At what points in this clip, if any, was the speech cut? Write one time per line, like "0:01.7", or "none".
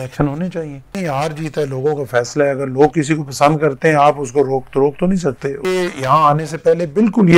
0:01.0
0:05.7

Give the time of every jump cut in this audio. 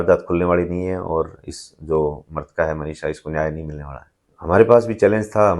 none

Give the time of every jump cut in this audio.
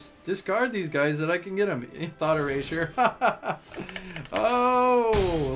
none

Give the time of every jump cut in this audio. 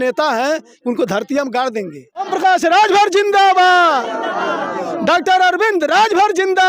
0:02.3

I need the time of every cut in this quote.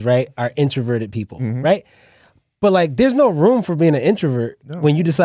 none

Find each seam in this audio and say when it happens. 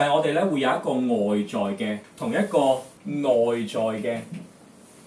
0:02.1
0:02.9

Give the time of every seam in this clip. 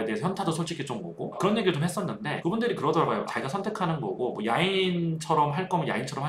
none

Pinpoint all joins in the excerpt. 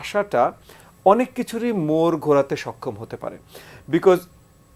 none

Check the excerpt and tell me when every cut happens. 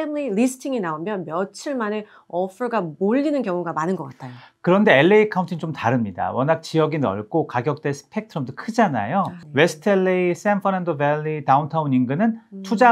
none

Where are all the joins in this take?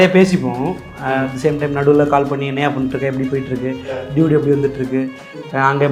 none

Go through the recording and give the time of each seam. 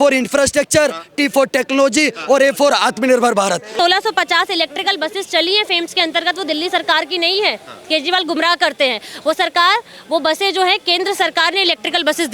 0:03.7

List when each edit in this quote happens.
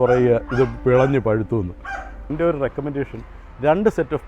0:02.3

